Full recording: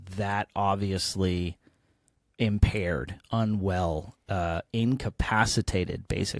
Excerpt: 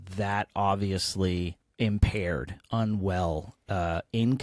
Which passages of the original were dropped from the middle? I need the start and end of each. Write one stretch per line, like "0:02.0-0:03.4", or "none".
0:01.6-0:02.2